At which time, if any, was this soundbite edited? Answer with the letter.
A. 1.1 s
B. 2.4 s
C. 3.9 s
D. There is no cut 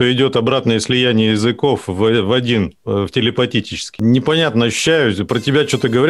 C